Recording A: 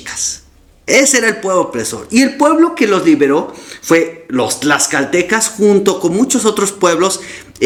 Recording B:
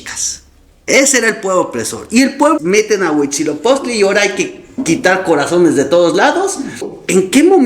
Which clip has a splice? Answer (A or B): B